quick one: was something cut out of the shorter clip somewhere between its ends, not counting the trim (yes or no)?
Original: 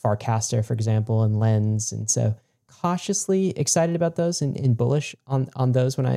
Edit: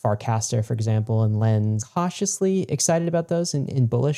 yes